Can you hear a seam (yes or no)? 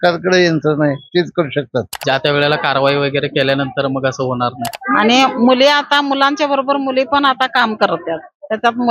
yes